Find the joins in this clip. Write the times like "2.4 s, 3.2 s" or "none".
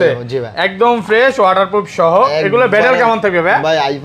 none

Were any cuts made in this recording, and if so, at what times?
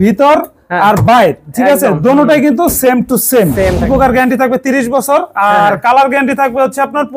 3.8 s

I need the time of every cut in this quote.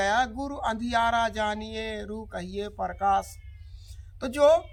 none

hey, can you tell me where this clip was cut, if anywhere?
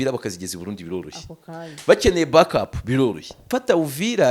3.3 s

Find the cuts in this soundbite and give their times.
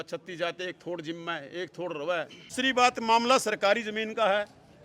2.5 s

